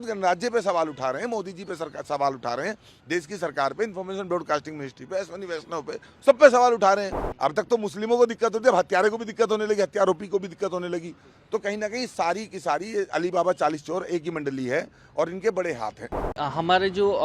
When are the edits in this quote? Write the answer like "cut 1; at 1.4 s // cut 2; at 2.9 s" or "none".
cut 1; at 7.1 s // cut 2; at 16.3 s